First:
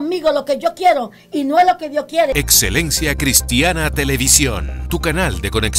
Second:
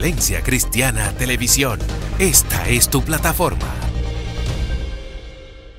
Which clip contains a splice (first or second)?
first